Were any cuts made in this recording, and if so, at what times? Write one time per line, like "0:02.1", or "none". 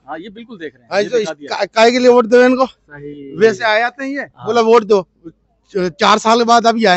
none

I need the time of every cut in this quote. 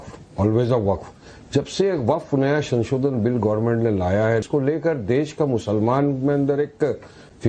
0:04.4

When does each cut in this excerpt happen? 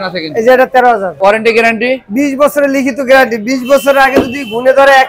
0:01.1

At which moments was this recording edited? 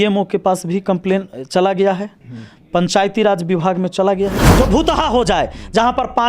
0:04.5

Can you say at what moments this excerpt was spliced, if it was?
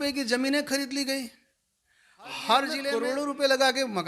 0:02.9

